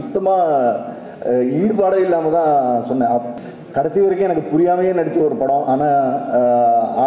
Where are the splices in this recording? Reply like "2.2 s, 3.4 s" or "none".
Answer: 3.4 s